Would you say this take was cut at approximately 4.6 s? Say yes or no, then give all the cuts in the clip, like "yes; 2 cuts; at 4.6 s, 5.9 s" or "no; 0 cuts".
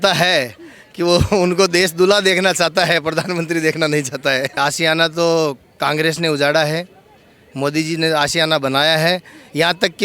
yes; 1 cut; at 4.6 s